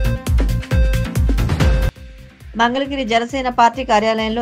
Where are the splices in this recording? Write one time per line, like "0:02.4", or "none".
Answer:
0:01.9